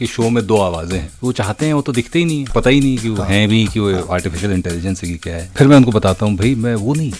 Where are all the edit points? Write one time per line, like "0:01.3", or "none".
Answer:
0:01.1
0:02.4
0:05.5